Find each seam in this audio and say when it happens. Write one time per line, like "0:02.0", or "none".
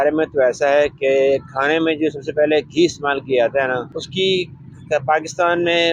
0:04.0